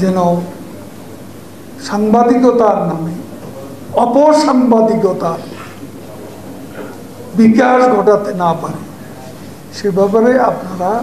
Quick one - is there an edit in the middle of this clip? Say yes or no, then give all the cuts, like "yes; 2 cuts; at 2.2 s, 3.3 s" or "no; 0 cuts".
no; 0 cuts